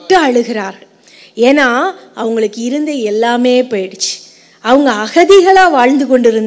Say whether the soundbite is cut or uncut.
uncut